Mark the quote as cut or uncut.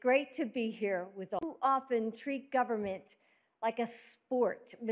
uncut